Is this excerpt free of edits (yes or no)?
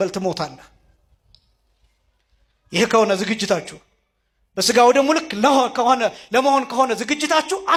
yes